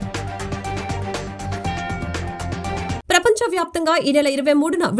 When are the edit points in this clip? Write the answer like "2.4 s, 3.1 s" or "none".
3.0 s

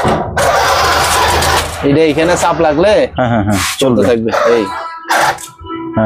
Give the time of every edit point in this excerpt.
none

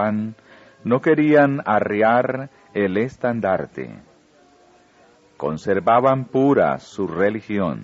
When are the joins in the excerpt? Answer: 2.9 s

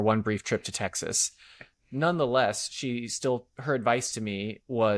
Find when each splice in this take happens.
none

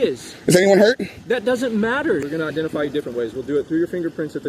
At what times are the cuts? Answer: 2.2 s

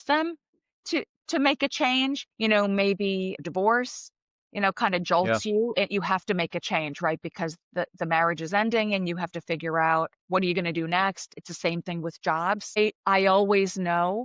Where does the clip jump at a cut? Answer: 2.3 s, 3.4 s, 10.2 s, 11.3 s, 12.8 s

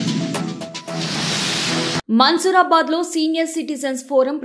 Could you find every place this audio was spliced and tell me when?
none

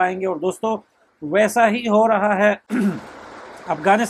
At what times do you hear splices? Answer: none

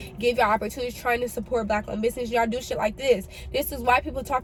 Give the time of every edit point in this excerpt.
none

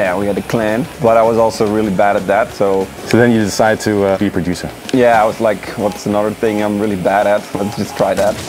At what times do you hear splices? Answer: 0.9 s, 3.0 s, 4.2 s

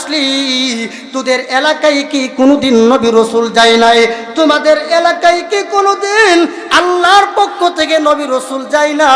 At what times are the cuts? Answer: none

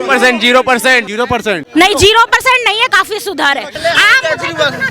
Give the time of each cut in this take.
1.6 s, 3.7 s

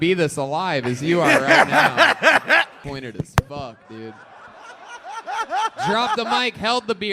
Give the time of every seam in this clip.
2.8 s

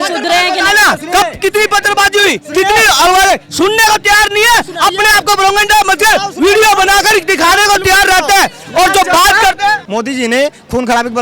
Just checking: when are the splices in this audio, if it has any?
9.8 s

